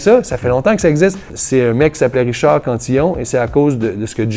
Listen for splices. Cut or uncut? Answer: cut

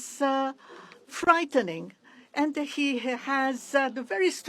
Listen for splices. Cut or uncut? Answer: uncut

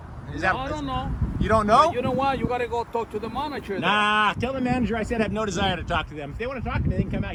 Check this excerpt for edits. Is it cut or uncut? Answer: uncut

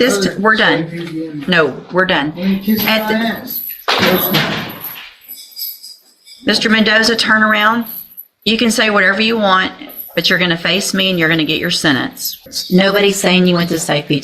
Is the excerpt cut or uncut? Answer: cut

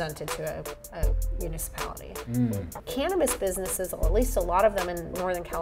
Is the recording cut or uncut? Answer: cut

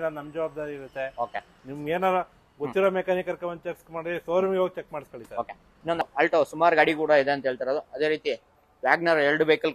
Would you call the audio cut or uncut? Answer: cut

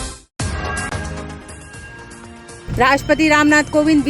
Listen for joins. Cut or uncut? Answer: cut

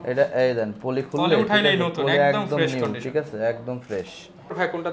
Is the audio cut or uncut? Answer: uncut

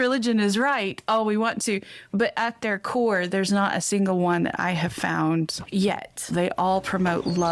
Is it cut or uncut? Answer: cut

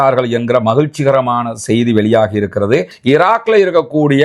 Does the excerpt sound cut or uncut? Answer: cut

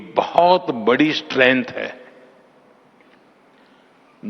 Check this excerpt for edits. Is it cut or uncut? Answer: cut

